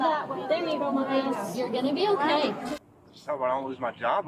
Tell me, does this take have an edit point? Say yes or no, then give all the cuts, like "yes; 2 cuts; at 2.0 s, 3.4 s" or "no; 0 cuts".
yes; 1 cut; at 2.7 s